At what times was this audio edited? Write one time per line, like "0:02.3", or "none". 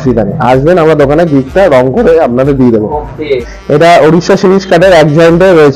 0:03.4

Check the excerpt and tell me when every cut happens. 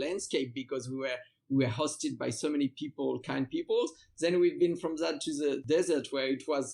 none

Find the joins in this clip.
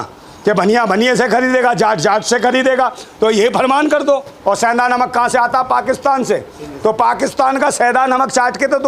0:04.3

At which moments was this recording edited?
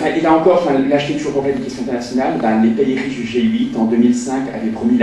0:02.8

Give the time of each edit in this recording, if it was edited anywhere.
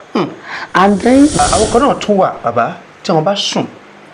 0:01.4

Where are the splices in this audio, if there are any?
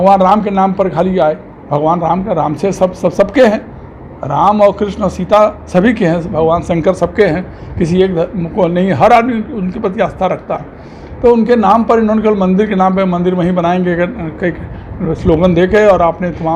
none

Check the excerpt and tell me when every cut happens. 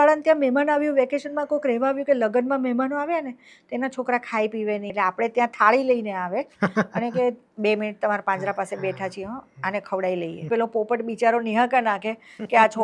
0:04.9
0:10.4

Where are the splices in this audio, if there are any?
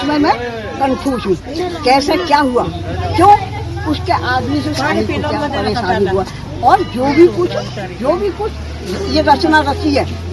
none

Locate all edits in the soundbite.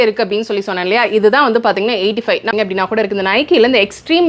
0:02.5

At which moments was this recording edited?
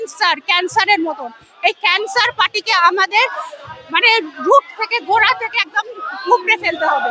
none

